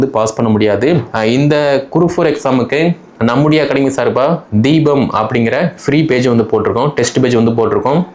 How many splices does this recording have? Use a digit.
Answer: 1